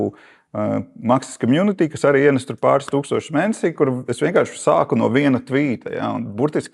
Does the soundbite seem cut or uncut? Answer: uncut